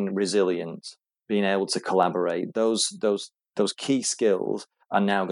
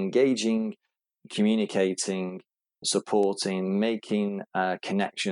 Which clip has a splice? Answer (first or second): second